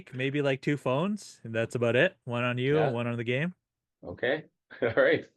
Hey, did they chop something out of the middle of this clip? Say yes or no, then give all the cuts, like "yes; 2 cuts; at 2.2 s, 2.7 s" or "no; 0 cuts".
no; 0 cuts